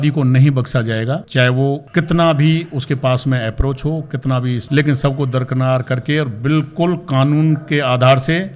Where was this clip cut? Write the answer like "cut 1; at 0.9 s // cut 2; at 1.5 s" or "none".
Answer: none